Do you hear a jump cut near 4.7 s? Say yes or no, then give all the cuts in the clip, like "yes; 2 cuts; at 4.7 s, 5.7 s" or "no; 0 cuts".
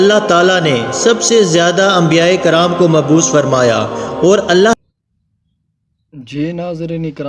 yes; 1 cut; at 4.7 s